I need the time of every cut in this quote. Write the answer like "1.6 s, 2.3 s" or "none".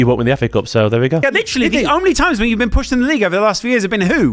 1.2 s